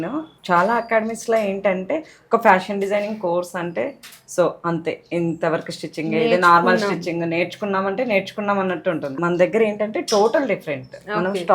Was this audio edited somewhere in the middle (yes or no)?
no